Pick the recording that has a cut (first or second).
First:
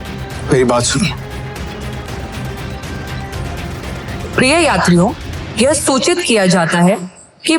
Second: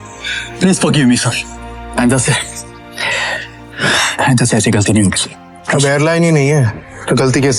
first